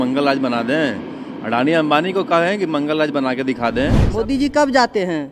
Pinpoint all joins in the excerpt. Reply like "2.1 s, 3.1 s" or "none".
4.0 s